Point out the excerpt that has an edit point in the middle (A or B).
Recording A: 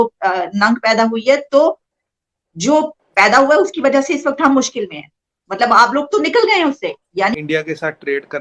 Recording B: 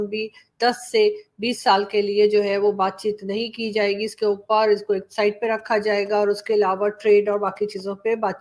A